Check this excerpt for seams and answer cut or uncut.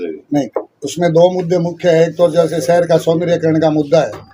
uncut